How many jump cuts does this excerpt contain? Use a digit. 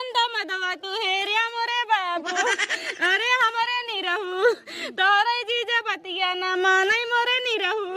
0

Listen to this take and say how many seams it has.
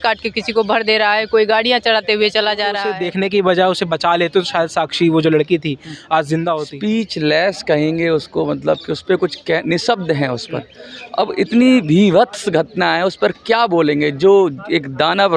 2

